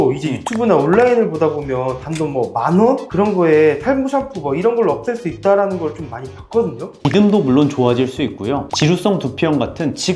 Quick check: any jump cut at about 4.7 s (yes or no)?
no